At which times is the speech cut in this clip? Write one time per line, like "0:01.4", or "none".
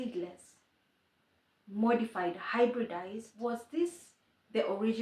0:03.3